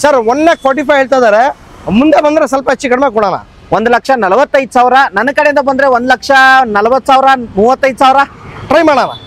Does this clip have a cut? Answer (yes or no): no